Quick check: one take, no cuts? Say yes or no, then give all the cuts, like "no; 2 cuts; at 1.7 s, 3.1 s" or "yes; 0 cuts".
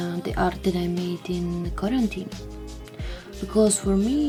yes; 0 cuts